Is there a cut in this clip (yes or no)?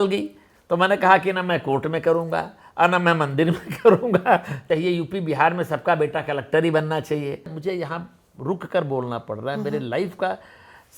yes